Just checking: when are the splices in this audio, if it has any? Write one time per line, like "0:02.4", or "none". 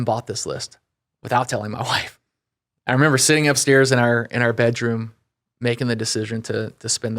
0:02.2